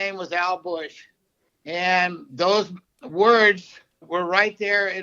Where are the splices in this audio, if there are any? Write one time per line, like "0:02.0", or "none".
0:04.0